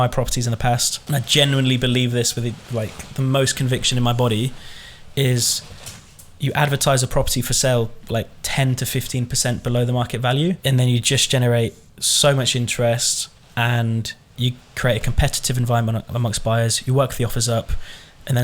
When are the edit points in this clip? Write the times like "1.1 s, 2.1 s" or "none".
0.9 s, 10.6 s